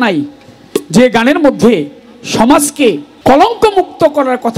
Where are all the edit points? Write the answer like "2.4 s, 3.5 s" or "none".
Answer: 3.1 s